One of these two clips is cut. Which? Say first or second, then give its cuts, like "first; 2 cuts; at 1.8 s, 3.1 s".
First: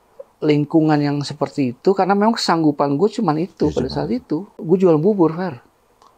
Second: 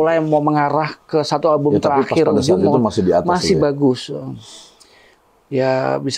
first; 1 cut; at 4.6 s